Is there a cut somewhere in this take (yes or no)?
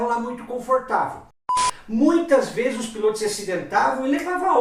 yes